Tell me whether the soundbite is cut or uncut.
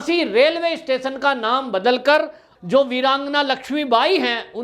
cut